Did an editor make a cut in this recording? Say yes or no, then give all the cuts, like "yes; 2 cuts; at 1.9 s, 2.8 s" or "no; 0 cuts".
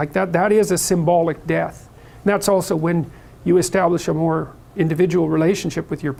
no; 0 cuts